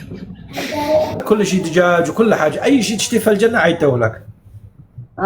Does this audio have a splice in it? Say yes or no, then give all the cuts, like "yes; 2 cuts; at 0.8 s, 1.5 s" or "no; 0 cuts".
yes; 1 cut; at 1.2 s